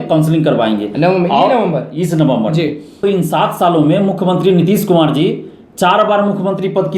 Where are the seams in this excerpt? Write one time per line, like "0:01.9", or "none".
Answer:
0:03.0